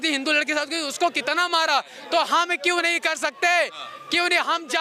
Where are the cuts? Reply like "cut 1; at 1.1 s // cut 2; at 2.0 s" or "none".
none